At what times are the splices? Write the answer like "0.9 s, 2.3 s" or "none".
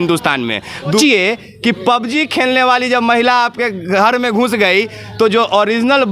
1.0 s